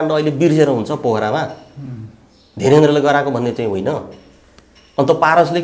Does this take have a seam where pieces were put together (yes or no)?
no